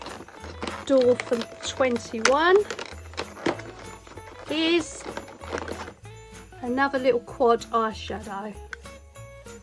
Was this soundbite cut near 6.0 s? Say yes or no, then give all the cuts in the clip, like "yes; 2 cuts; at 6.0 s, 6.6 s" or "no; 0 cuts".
no; 1 cut; at 8.6 s